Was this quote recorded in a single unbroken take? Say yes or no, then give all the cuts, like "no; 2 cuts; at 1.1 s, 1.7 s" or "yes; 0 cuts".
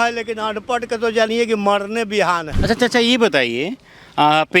no; 1 cut; at 2.5 s